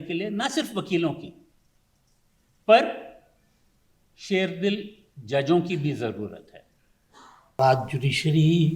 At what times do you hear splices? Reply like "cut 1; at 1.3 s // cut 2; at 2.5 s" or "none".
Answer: cut 1; at 7.6 s